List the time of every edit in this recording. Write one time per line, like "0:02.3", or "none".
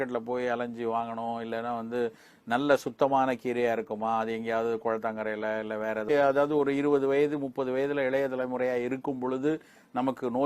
0:06.1